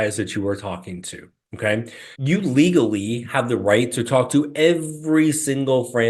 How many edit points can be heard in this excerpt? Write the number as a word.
one